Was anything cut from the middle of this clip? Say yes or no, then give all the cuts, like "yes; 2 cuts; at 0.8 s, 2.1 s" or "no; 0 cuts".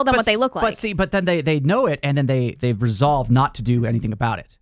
yes; 1 cut; at 2.6 s